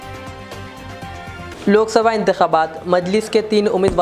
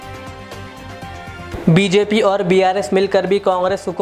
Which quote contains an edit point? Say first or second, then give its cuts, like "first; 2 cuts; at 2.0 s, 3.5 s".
first; 1 cut; at 1.5 s